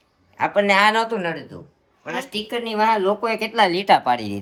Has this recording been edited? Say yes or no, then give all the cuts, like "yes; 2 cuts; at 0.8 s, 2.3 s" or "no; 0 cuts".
no; 0 cuts